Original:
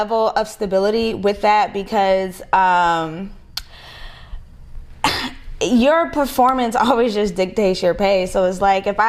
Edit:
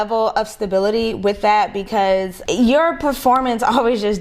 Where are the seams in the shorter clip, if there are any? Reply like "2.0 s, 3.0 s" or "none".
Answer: 2.4 s

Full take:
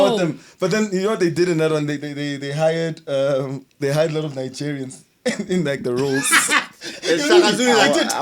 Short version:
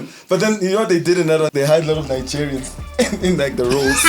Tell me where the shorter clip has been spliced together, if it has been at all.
1.5 s

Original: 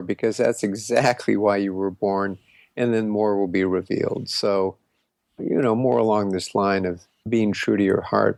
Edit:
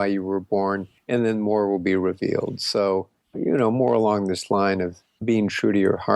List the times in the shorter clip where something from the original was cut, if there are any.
0.9 s, 3.2 s

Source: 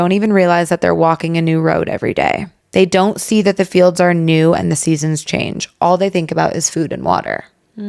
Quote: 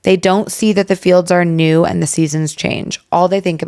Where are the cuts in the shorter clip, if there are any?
none

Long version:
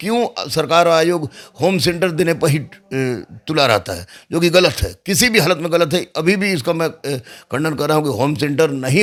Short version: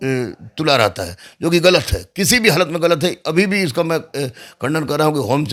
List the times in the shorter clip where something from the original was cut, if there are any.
none

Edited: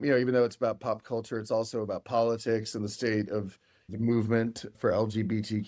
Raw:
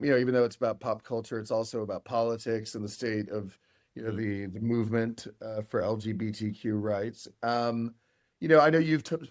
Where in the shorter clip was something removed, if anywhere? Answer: 3.9 s, 4.8 s

